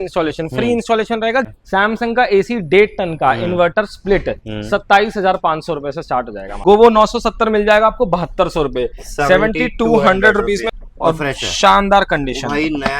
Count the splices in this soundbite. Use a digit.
3